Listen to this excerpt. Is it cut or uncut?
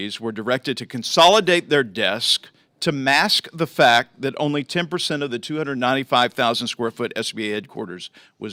uncut